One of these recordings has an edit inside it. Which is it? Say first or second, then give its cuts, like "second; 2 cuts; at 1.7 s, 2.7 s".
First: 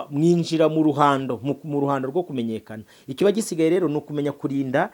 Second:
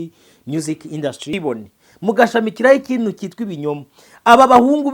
second; 1 cut; at 1.4 s